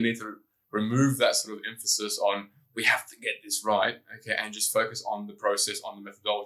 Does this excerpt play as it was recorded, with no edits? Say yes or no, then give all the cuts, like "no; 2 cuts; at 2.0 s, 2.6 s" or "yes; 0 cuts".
yes; 0 cuts